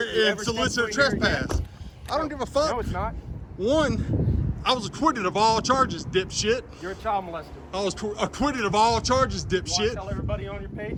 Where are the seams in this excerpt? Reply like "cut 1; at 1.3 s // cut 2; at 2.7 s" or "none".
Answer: none